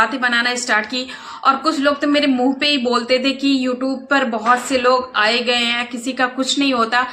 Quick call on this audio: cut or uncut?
uncut